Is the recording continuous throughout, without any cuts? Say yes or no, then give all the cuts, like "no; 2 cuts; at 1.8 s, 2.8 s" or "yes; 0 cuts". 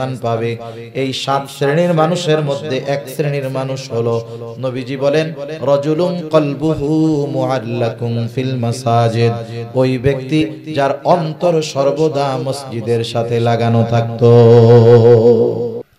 yes; 0 cuts